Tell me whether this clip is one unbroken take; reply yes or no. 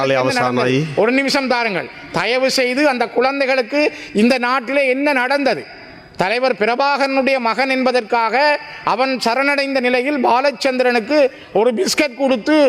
yes